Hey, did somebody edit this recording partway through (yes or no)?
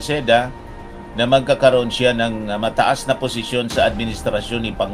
no